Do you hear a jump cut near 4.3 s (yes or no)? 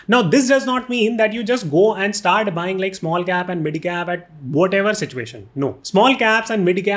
no